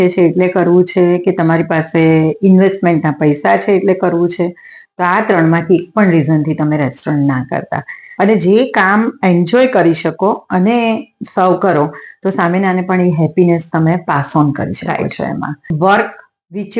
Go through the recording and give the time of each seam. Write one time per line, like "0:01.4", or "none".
0:08.1
0:15.7